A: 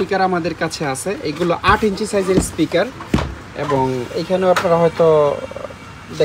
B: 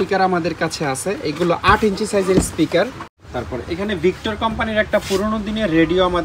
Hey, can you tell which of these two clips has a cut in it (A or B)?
B